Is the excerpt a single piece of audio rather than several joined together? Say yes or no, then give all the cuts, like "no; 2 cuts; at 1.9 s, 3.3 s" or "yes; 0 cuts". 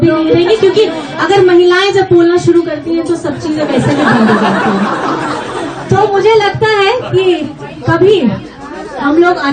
yes; 0 cuts